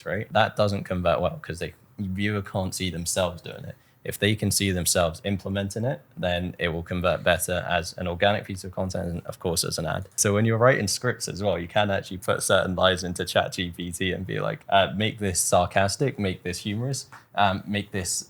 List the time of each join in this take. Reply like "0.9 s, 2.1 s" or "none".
10.1 s